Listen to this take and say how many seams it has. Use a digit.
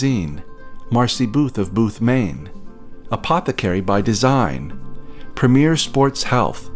0